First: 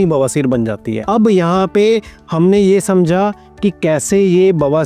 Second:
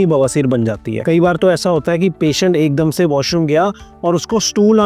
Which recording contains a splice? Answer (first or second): second